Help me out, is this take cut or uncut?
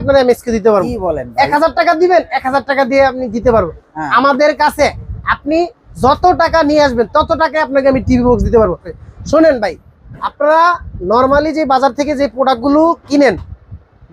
cut